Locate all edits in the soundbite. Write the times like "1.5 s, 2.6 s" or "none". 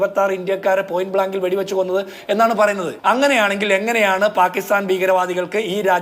2.9 s